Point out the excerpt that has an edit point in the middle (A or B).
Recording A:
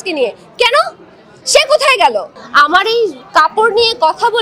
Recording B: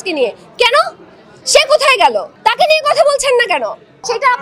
A